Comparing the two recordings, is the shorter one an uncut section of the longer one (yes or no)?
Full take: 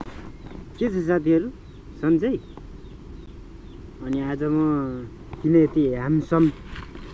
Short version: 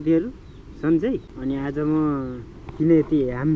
no